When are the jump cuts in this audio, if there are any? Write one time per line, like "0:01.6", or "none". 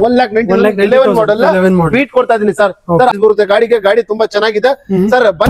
0:03.1